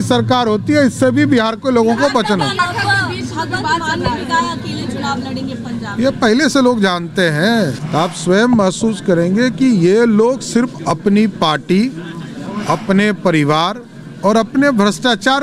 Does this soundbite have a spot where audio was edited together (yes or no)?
yes